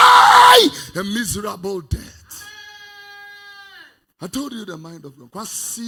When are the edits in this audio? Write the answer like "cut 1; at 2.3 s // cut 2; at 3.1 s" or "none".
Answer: none